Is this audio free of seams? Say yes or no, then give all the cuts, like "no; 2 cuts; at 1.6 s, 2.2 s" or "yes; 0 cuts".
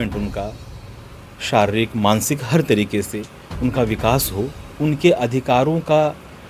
yes; 0 cuts